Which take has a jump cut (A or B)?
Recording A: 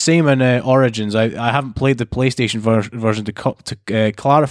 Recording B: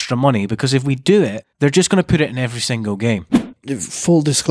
B